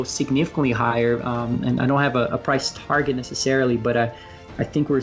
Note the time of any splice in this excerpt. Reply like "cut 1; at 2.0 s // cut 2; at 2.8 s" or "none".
none